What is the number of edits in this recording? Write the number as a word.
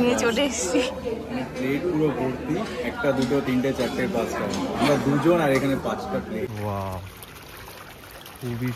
one